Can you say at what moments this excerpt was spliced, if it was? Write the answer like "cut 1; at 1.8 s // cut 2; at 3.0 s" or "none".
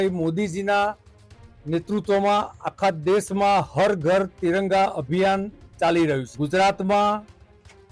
cut 1; at 6.3 s